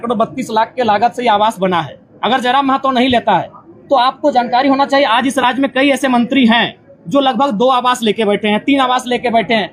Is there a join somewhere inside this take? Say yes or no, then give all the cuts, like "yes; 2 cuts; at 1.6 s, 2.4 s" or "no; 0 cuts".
no; 0 cuts